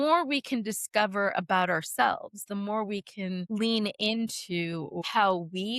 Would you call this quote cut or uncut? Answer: cut